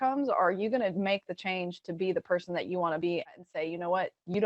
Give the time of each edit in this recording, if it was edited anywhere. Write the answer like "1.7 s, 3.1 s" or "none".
3.4 s

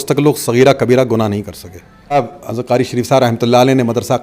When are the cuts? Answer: 2.1 s

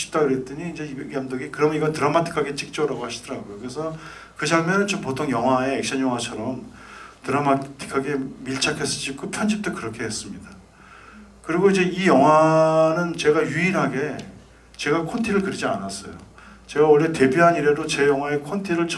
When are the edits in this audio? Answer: none

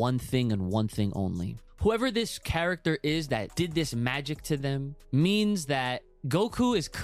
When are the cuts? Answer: 1.6 s, 3.5 s, 5.0 s, 6.1 s

